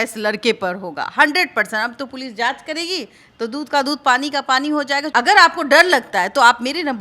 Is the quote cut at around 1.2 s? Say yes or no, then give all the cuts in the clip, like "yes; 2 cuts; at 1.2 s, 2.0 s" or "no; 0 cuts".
no; 1 cut; at 5.1 s